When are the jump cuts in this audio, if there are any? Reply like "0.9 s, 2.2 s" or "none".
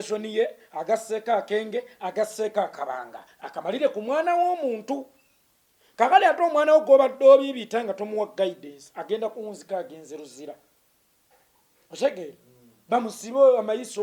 none